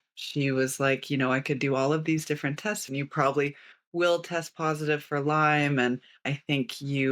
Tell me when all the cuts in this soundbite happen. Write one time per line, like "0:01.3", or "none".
0:02.8
0:06.3